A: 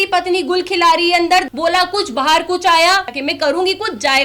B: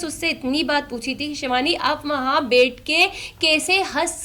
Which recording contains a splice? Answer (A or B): A